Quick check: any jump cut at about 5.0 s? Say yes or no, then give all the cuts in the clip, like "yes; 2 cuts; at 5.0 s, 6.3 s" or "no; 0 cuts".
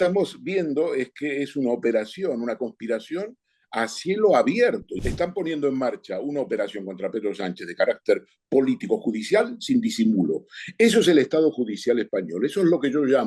yes; 1 cut; at 5.0 s